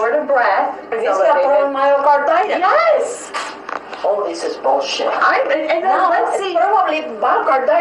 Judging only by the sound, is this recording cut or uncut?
cut